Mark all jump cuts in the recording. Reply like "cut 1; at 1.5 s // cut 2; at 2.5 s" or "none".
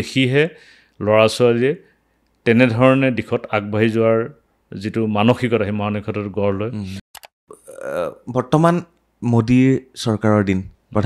cut 1; at 7.2 s